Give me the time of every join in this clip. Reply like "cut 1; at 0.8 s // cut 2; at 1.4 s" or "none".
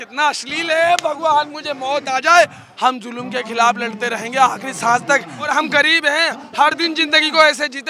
cut 1; at 2.6 s // cut 2; at 5.5 s